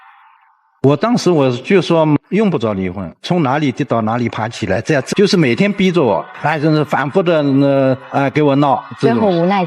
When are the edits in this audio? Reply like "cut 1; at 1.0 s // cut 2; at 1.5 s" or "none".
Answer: cut 1; at 5.1 s